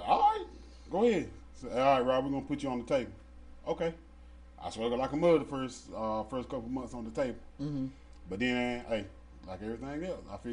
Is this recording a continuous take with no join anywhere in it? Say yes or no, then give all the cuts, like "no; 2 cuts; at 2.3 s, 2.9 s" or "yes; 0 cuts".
yes; 0 cuts